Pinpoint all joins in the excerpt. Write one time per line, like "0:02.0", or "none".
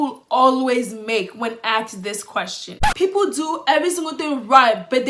0:02.8